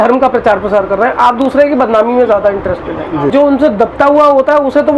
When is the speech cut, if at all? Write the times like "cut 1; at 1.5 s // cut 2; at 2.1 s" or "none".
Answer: cut 1; at 3.3 s